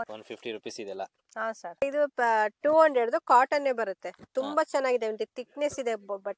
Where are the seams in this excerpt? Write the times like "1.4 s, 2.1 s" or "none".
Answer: none